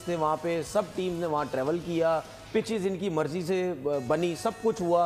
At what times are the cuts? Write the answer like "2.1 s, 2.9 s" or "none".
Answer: none